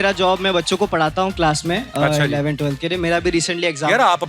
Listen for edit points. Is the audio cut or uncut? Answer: uncut